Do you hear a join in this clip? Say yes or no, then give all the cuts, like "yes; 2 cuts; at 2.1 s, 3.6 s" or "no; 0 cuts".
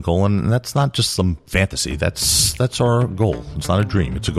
no; 0 cuts